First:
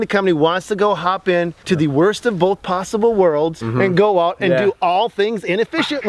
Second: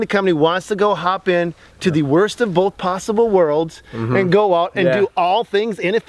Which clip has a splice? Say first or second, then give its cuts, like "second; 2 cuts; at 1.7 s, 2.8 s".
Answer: first; 2 cuts; at 1.6 s, 3.6 s